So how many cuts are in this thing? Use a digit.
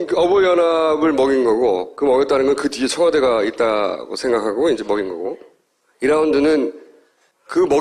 1